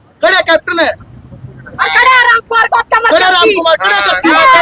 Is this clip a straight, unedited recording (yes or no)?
yes